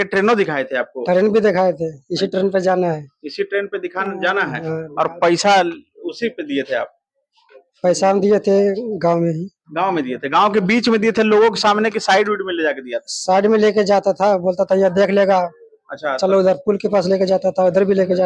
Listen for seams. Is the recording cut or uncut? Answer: uncut